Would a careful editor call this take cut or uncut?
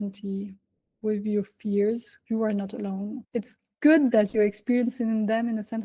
cut